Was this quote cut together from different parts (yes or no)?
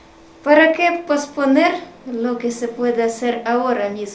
no